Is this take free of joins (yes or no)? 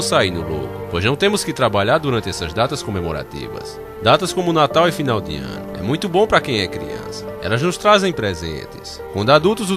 yes